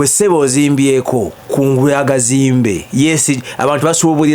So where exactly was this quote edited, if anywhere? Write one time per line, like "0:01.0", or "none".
0:01.4